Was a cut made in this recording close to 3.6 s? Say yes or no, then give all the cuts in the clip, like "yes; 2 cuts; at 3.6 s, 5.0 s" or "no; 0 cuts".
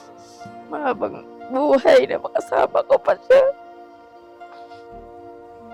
no; 0 cuts